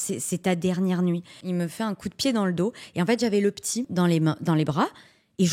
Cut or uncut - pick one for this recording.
cut